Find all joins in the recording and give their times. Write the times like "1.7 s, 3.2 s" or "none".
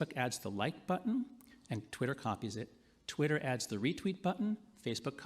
3.9 s